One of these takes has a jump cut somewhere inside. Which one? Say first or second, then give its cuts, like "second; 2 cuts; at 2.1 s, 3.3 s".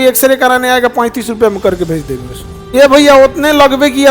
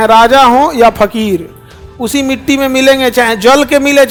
first; 1 cut; at 2.5 s